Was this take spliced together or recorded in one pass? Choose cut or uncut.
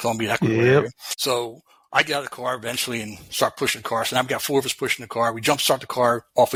uncut